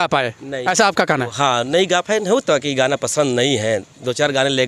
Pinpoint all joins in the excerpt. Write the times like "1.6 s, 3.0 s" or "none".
none